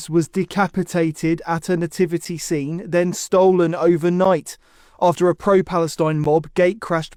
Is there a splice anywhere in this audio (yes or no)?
no